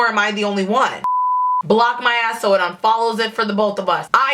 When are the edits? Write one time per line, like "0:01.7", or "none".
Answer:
0:01.1